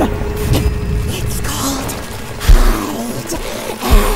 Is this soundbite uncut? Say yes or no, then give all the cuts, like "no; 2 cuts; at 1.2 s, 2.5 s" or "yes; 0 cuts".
yes; 0 cuts